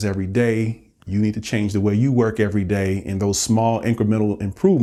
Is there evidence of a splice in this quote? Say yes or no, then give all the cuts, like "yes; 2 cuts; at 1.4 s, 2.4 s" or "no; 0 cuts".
no; 0 cuts